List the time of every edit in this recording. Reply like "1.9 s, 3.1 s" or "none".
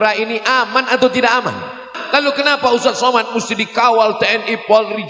1.9 s